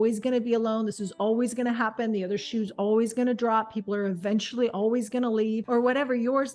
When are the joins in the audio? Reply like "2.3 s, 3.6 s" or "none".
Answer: 5.6 s